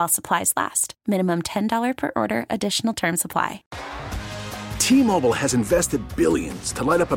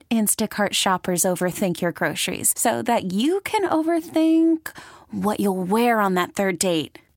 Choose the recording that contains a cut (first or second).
first